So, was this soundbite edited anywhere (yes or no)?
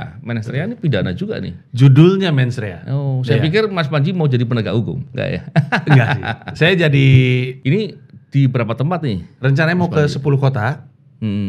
yes